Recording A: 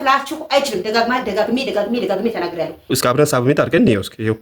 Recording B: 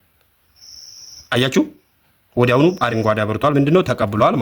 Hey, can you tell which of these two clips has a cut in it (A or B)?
A